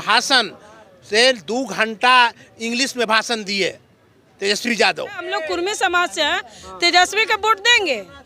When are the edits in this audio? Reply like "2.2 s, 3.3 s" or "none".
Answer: 5.3 s